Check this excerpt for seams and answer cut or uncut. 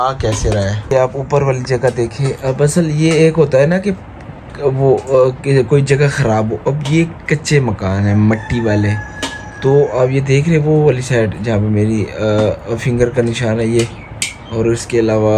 uncut